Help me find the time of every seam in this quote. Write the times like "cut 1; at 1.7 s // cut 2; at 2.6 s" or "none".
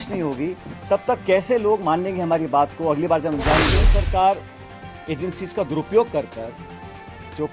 cut 1; at 3.8 s